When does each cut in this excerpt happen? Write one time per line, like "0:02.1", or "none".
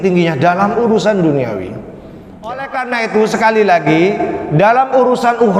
0:02.6

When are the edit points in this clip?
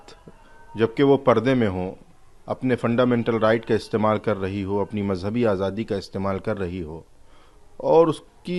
none

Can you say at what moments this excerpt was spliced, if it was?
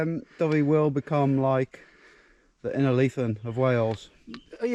none

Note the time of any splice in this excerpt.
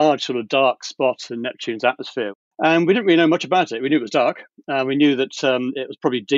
0:02.4

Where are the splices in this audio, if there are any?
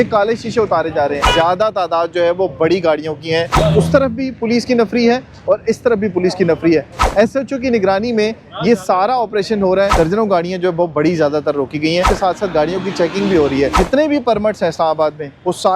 0:01.2
0:03.5
0:09.9
0:12.1
0:13.7

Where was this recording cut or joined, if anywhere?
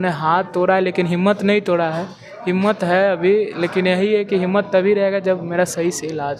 none

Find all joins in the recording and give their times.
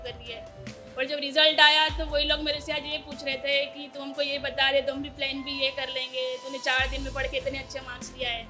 none

